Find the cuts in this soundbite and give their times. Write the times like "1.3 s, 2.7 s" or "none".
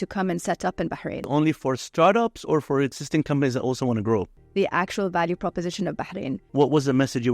1.2 s, 4.4 s, 6.4 s